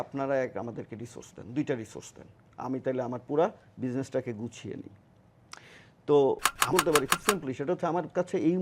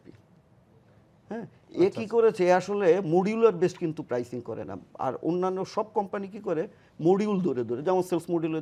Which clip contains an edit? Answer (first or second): first